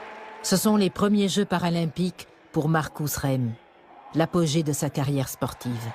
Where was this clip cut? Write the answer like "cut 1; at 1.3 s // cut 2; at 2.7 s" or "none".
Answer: cut 1; at 1.9 s